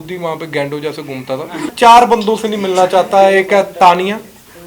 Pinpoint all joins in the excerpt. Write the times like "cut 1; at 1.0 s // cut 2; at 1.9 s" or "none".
cut 1; at 1.7 s

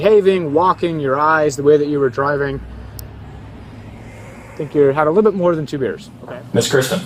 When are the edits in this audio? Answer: cut 1; at 6.1 s

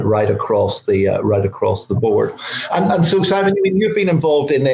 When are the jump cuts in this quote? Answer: none

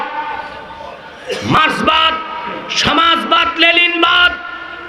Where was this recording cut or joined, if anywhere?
cut 1; at 1.2 s

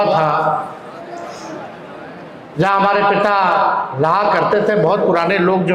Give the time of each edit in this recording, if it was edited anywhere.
none

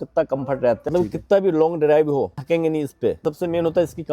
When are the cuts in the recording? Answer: cut 1; at 0.9 s // cut 2; at 2.4 s // cut 3; at 3.2 s

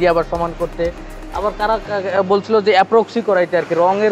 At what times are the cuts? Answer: none

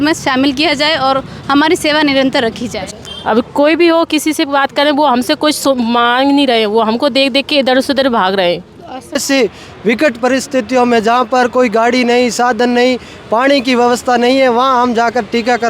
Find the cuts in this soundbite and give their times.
cut 1; at 2.7 s // cut 2; at 9.2 s

